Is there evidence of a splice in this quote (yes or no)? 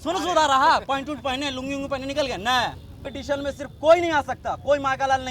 yes